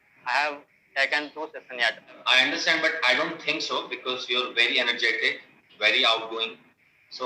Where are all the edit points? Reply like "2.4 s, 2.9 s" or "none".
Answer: 2.2 s